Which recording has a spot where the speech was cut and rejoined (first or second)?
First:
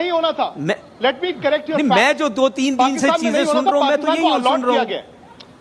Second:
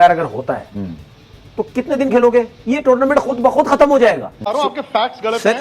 second